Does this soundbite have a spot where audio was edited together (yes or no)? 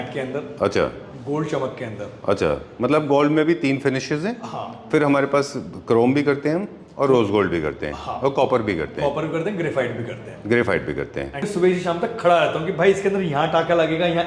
yes